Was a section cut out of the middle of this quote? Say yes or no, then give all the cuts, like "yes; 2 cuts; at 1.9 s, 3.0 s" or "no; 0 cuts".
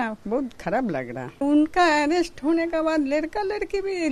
yes; 1 cut; at 1.4 s